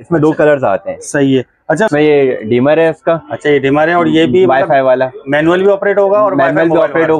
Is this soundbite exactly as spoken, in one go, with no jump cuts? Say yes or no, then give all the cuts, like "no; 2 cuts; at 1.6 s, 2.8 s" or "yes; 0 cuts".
no; 1 cut; at 1.9 s